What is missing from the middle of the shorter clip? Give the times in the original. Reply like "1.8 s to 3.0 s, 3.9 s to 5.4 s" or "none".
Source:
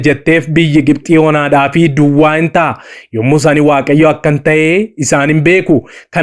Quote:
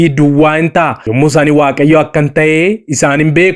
2.8 s to 3.1 s